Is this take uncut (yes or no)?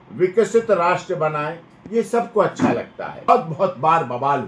no